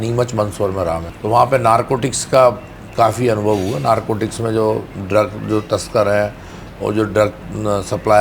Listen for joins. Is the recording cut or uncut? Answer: cut